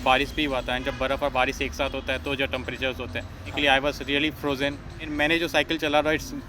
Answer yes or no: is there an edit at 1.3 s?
no